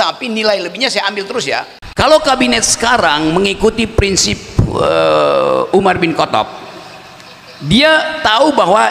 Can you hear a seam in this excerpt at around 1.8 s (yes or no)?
yes